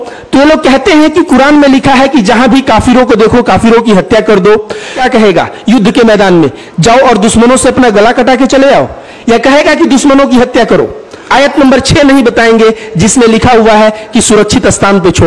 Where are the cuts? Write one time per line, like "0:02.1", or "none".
0:05.0
0:11.2